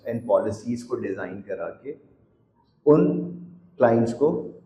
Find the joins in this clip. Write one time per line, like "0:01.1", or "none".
none